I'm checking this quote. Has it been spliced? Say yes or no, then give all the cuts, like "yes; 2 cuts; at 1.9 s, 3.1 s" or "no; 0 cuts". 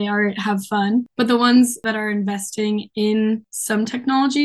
yes; 3 cuts; at 1.1 s, 1.8 s, 3.5 s